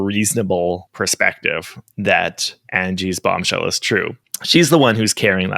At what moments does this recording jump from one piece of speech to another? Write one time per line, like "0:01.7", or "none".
none